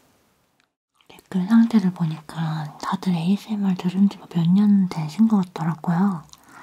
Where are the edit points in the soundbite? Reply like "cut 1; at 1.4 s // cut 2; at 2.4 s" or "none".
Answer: cut 1; at 1.2 s